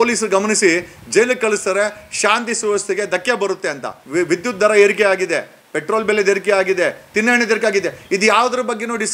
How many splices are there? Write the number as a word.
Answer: one